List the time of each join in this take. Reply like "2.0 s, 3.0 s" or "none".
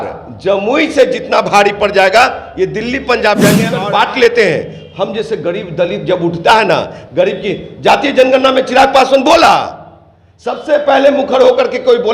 3.6 s